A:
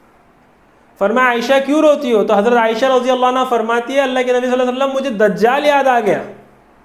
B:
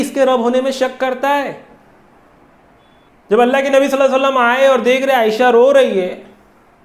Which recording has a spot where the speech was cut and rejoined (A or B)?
B